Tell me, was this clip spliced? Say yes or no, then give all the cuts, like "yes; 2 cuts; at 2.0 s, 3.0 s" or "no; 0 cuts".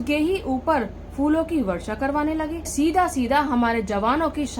yes; 1 cut; at 2.7 s